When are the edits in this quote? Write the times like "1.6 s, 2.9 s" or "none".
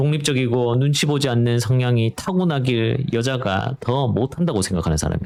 none